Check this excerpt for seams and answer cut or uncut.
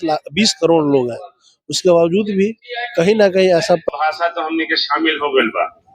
cut